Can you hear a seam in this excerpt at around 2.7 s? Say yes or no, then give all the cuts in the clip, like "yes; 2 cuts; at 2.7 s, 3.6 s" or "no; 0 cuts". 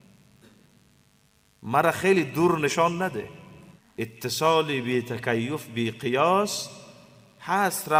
no; 0 cuts